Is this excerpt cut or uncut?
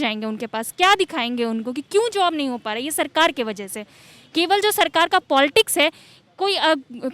uncut